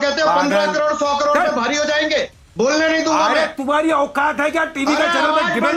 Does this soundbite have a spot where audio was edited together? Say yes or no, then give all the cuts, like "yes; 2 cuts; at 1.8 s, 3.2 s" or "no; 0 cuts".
no; 0 cuts